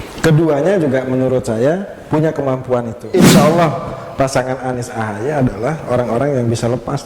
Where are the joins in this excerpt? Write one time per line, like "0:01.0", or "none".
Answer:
0:03.0